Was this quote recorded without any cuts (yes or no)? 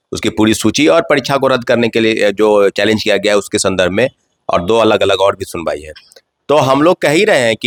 yes